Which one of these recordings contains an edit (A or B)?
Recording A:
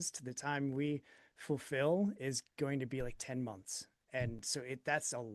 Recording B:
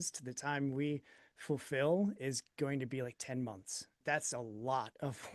B